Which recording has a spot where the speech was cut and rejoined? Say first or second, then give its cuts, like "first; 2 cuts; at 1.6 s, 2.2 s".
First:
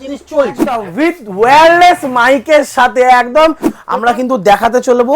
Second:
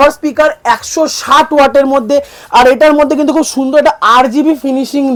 first; 2 cuts; at 0.9 s, 3.7 s